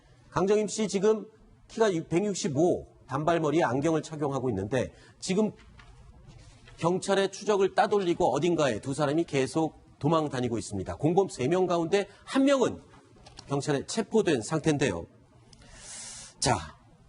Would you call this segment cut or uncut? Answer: cut